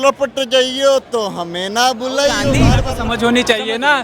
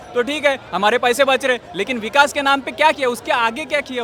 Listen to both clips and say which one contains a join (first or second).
first